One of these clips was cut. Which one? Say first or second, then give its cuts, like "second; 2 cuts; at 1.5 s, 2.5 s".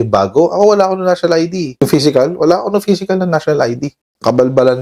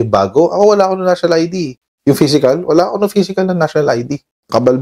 first; 1 cut; at 1.7 s